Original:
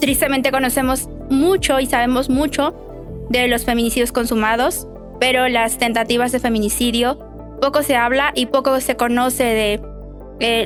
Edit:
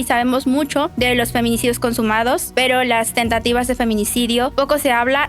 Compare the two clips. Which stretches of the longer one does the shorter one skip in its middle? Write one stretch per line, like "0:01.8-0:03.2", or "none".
0:02.7-0:03.2
0:04.8-0:05.1
0:07.2-0:07.6